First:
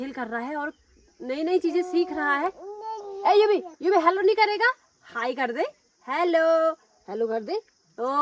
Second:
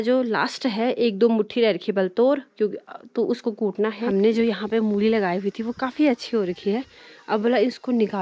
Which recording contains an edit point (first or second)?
second